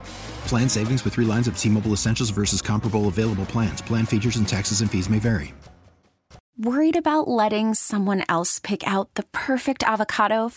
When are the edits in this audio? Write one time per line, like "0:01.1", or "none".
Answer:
0:06.4